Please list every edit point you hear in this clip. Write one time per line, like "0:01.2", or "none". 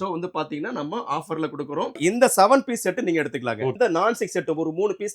0:02.0
0:03.7